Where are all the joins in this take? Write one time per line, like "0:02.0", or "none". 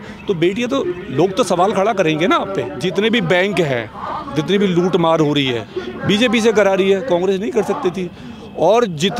0:02.7

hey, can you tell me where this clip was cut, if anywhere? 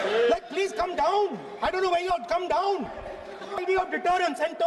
0:03.6

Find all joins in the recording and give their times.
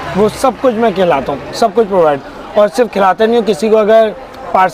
none

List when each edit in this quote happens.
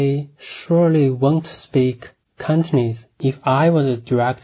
0:03.2

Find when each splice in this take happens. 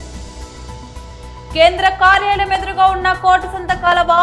0:01.5

